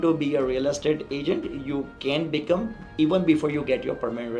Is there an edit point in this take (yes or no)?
no